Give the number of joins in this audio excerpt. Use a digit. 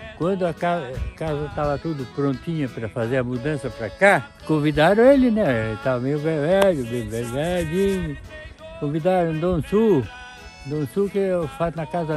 1